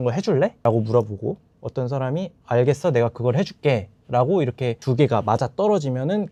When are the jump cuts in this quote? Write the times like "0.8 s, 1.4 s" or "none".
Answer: none